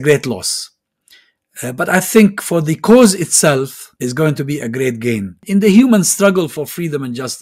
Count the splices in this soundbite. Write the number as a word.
two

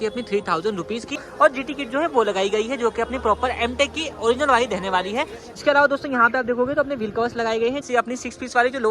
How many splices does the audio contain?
three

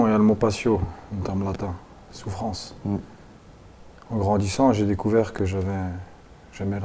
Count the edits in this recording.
zero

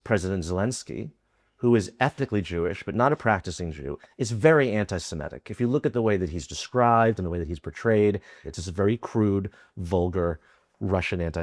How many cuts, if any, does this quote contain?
two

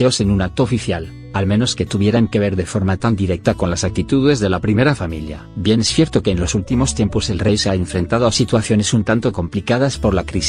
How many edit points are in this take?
one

